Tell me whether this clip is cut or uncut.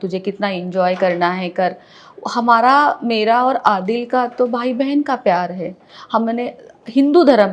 uncut